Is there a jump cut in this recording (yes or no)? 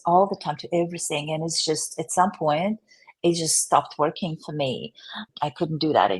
yes